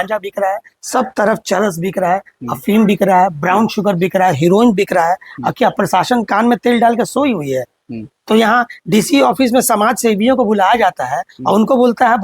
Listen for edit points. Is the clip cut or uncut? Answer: uncut